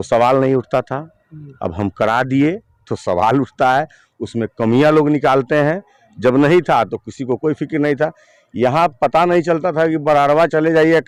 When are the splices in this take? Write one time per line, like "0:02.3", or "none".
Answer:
none